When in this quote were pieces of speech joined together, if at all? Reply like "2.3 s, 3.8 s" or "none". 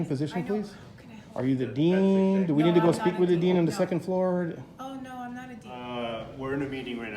5.8 s